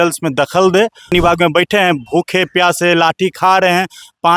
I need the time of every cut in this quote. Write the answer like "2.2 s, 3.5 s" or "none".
1.1 s